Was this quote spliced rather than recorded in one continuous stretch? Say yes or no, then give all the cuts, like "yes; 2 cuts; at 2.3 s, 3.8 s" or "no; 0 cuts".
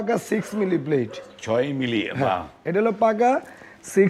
no; 0 cuts